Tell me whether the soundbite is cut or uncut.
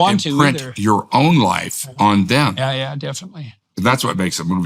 cut